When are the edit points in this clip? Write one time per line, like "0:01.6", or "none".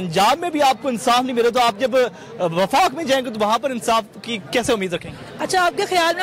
none

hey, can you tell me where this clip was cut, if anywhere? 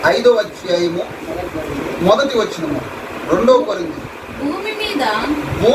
none

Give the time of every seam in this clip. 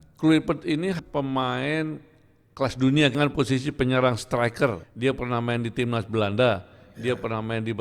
0:01.0
0:03.1
0:04.9

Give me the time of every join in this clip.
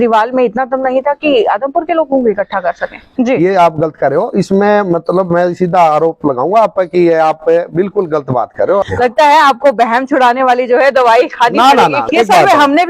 0:03.1
0:08.8
0:12.1

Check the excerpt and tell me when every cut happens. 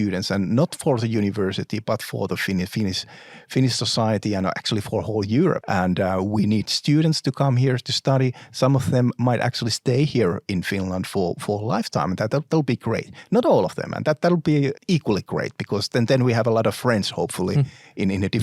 0:05.6
0:14.8

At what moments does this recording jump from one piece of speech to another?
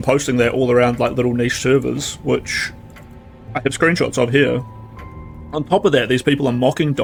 none

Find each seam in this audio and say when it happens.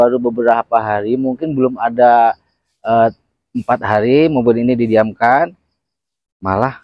none

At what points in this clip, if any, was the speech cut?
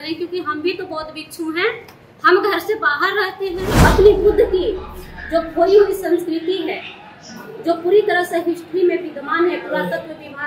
0:03.7

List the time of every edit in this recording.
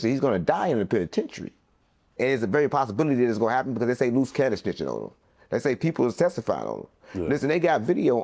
0:02.1

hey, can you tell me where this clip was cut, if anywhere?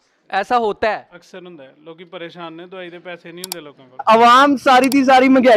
0:04.0

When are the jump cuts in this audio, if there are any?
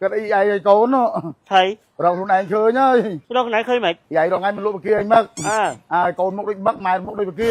none

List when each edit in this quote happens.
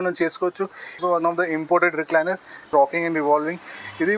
0:01.0
0:02.7

